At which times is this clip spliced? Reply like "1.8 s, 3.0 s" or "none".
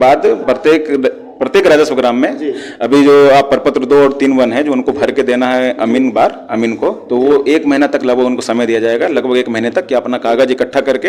none